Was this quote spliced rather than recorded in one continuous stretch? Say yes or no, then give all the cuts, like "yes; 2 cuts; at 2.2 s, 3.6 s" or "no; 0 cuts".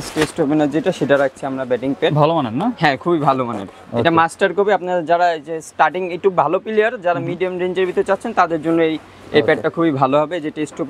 no; 0 cuts